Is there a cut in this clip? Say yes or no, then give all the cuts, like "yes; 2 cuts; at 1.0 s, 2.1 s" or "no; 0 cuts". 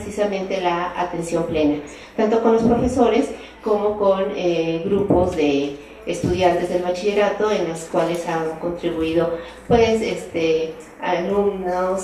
no; 0 cuts